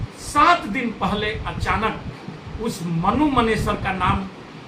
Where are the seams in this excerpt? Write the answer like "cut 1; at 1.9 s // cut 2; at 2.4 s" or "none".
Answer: none